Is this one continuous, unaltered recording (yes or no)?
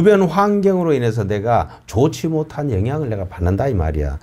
yes